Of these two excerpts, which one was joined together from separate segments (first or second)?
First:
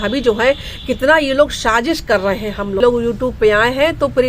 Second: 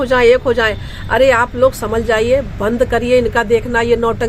first